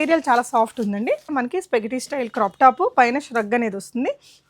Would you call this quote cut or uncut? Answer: cut